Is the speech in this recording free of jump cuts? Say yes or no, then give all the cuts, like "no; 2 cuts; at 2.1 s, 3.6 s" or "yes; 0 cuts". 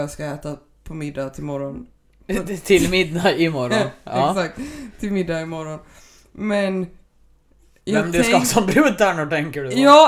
yes; 0 cuts